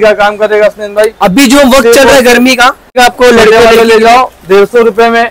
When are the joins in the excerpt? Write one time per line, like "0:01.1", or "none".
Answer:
0:03.0